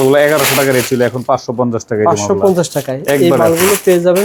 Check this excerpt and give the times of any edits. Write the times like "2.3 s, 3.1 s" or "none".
none